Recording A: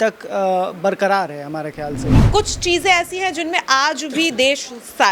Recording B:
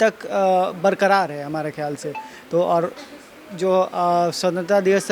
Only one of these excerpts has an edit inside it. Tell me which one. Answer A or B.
A